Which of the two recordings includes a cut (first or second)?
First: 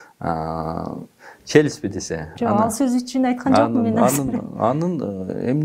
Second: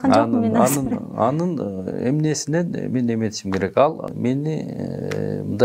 second